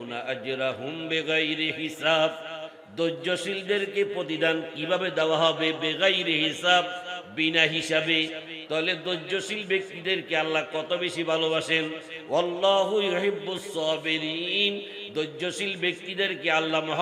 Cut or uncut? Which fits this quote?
uncut